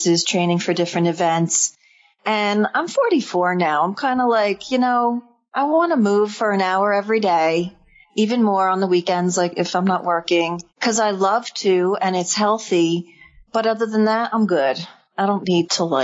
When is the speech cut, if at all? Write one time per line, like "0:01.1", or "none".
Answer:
0:09.5